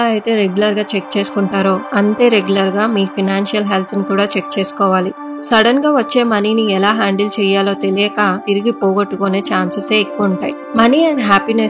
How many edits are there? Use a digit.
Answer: 2